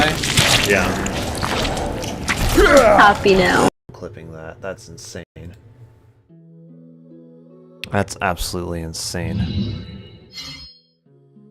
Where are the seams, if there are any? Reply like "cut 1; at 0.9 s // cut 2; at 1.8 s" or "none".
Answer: cut 1; at 3.7 s // cut 2; at 5.2 s